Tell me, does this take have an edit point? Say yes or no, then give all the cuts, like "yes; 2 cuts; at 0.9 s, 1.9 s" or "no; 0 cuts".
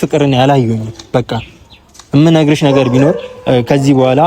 no; 0 cuts